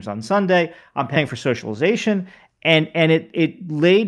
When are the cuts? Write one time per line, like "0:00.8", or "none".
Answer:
0:01.2

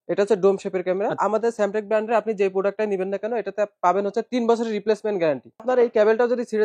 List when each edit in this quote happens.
0:01.2
0:05.6

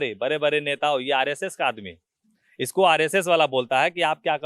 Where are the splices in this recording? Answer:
none

